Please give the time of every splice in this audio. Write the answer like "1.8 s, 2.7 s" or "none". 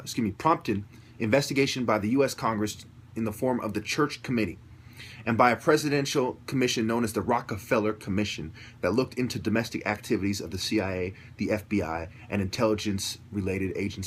none